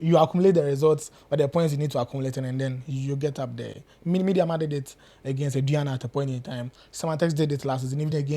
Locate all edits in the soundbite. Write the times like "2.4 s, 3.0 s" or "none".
none